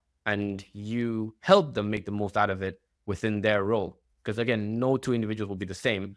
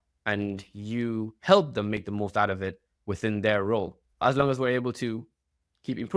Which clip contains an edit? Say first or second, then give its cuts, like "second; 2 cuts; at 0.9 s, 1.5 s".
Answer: second; 1 cut; at 4.2 s